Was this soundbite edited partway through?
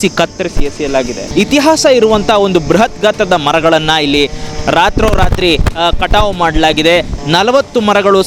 yes; 2 cuts; at 1.2 s, 7.1 s

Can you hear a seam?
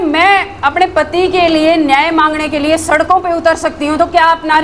no; 0 cuts

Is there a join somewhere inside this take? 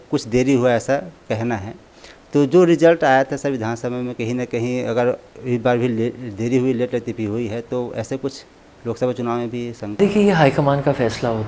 no; 0 cuts

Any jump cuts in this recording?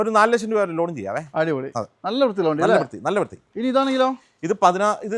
no; 0 cuts

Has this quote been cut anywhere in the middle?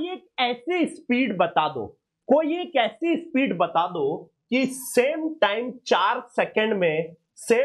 no; 0 cuts

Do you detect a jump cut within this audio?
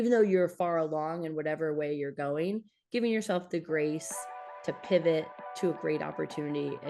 no; 0 cuts

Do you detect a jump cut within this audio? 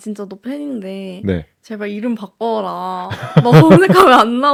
no; 0 cuts

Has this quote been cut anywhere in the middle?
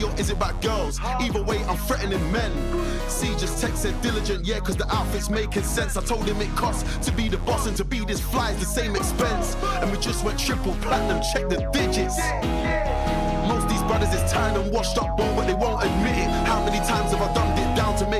no; 0 cuts

